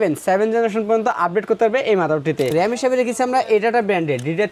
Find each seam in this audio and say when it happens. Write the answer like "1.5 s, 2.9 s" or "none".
2.5 s